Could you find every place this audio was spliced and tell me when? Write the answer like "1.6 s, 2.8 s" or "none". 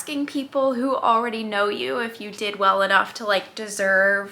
none